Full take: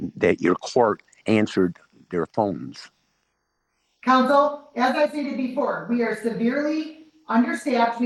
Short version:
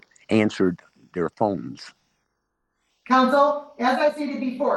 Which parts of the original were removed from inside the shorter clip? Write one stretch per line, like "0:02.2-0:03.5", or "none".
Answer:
none